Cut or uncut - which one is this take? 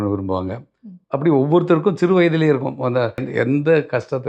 cut